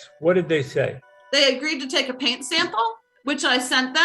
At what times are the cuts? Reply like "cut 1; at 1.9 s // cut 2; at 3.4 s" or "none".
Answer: cut 1; at 1.1 s // cut 2; at 3.1 s